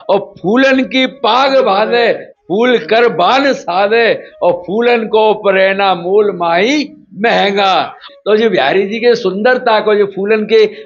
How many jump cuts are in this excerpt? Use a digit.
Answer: 1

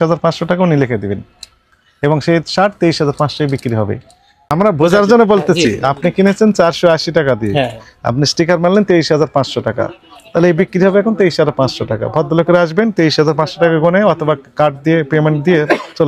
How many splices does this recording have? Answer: 1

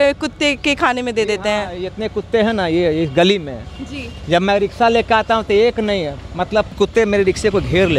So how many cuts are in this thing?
1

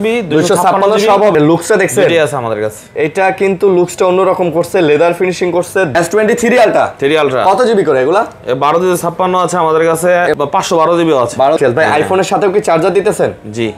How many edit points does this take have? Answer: 4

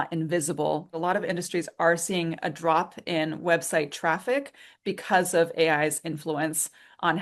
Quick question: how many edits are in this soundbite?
1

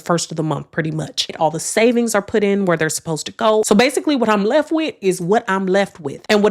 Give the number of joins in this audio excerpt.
1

